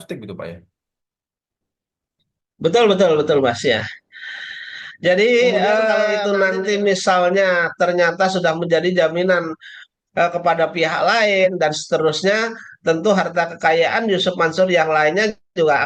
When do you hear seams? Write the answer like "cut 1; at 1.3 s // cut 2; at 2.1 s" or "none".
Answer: cut 1; at 6.2 s